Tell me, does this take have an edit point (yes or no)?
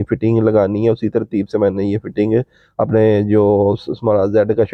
no